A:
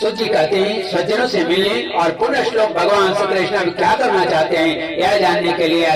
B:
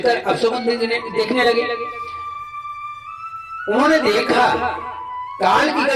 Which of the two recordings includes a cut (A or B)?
B